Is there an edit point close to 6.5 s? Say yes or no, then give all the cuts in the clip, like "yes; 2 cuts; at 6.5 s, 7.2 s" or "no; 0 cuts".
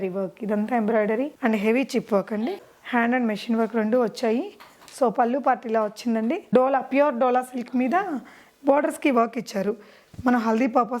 yes; 2 cuts; at 1.3 s, 6.5 s